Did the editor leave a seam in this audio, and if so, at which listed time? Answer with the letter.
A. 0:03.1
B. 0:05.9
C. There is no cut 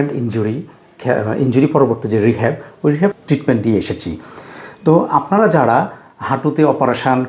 A